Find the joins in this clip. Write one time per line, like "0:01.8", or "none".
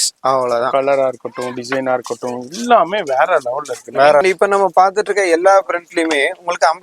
0:04.2